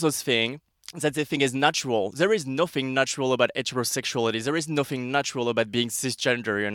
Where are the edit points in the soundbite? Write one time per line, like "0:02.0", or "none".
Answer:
none